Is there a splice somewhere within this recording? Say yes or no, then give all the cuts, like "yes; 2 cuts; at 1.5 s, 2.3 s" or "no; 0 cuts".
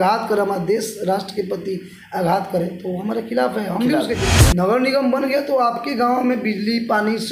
yes; 1 cut; at 4.3 s